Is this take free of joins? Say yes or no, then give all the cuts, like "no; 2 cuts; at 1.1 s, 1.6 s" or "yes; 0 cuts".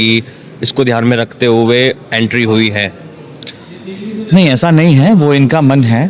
yes; 0 cuts